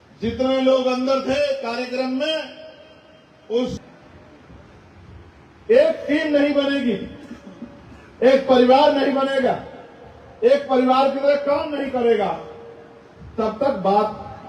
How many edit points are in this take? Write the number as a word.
one